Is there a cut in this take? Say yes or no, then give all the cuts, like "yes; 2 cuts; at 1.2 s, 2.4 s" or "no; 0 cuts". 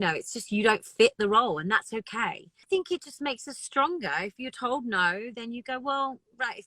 yes; 1 cut; at 2.6 s